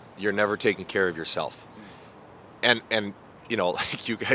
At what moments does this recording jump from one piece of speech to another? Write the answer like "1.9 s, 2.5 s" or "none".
none